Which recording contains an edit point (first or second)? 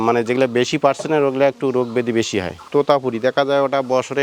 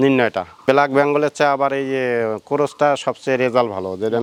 first